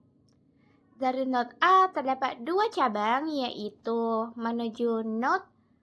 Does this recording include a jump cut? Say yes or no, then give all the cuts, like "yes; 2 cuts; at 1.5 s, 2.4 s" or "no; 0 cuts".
no; 0 cuts